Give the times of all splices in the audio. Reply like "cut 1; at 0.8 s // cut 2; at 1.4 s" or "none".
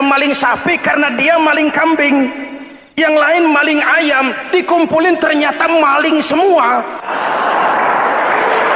cut 1; at 7.0 s